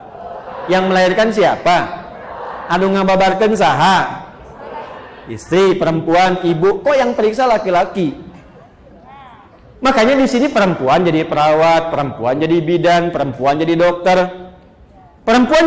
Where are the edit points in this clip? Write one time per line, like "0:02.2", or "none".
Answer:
none